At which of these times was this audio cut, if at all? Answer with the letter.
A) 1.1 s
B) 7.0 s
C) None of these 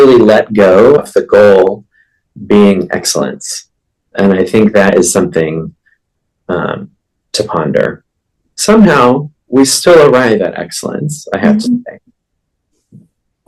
A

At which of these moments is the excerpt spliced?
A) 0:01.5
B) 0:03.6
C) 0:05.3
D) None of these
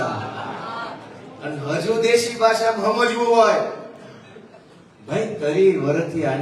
C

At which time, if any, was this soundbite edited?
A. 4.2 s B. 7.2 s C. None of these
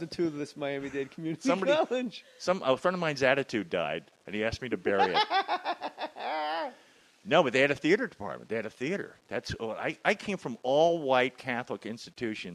A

